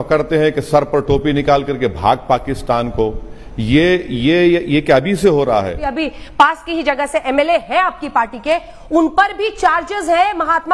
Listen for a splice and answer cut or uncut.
cut